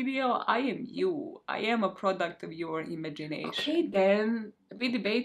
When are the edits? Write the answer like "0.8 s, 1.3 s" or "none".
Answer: 3.5 s